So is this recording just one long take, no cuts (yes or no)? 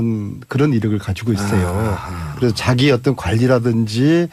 no